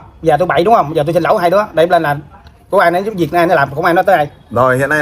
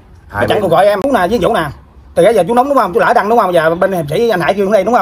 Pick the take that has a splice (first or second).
second